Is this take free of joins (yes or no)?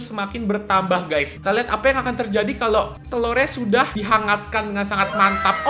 no